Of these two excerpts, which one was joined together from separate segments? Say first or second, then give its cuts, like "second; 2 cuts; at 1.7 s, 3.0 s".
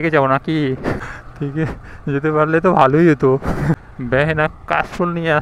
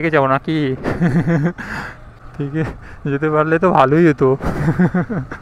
first; 2 cuts; at 1.0 s, 3.8 s